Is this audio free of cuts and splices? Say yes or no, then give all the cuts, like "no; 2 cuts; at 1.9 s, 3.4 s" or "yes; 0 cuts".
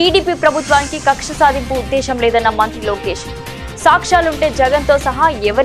yes; 0 cuts